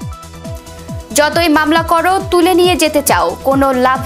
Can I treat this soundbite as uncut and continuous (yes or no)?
no